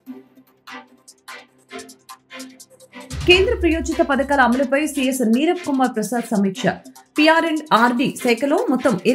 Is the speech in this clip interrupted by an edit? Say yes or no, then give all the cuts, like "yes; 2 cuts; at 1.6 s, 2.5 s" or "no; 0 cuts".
no; 0 cuts